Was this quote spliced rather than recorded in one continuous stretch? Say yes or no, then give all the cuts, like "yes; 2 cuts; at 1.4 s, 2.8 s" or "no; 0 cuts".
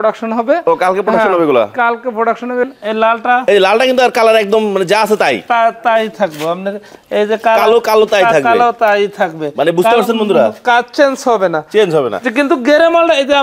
yes; 1 cut; at 2.6 s